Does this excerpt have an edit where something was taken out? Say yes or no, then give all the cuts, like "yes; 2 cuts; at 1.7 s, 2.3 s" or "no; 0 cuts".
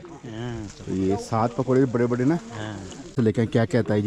yes; 1 cut; at 3.1 s